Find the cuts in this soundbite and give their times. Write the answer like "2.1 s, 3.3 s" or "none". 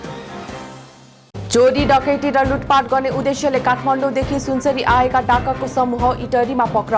none